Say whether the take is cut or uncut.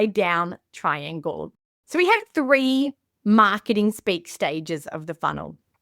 cut